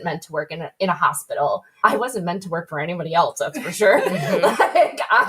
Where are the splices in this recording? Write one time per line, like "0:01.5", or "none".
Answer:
0:01.7